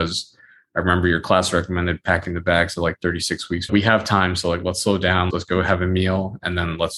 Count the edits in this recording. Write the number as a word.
zero